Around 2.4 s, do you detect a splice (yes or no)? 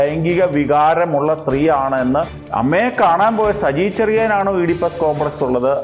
yes